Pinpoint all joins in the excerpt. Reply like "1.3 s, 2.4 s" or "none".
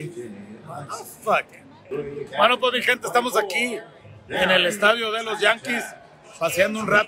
1.9 s